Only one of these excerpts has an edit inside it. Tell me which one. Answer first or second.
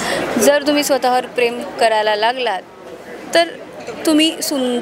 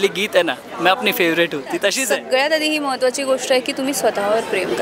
second